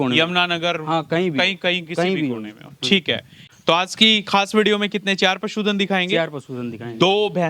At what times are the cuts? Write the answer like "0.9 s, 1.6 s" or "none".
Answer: 3.4 s